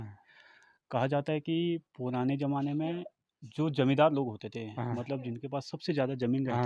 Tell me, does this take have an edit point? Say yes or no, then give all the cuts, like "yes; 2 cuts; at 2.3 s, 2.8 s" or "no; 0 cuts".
no; 0 cuts